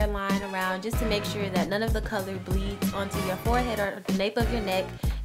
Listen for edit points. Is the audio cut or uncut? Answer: cut